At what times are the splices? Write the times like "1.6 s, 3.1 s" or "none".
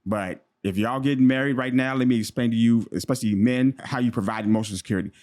3.8 s